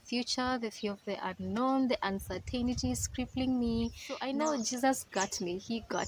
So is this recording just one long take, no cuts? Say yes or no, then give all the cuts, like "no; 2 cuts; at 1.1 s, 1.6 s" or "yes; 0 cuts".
no; 1 cut; at 4.1 s